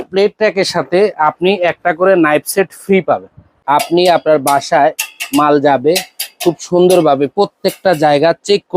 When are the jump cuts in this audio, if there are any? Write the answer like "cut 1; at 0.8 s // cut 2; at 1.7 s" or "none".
cut 1; at 3.5 s